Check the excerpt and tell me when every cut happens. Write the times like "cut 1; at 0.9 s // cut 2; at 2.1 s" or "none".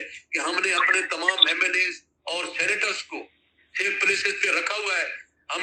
none